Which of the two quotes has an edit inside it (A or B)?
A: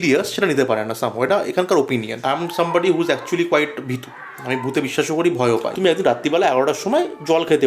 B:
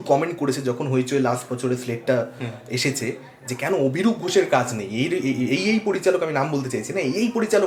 A